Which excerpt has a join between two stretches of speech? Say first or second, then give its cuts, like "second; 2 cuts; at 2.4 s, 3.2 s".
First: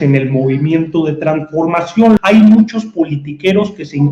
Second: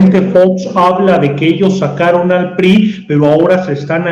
first; 1 cut; at 2.2 s